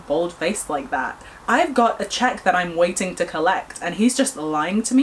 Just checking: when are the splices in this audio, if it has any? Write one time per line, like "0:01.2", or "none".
none